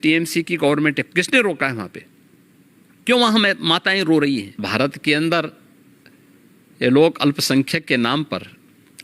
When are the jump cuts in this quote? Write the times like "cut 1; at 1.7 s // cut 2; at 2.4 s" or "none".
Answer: cut 1; at 4.6 s